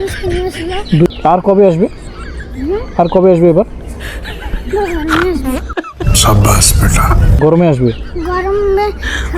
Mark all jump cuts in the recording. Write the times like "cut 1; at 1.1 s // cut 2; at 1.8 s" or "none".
cut 1; at 1.1 s